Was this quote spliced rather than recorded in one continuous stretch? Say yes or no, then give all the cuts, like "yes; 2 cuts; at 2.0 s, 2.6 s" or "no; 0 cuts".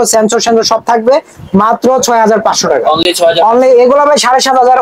no; 0 cuts